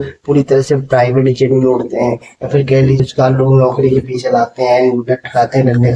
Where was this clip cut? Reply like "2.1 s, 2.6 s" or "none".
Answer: 3.0 s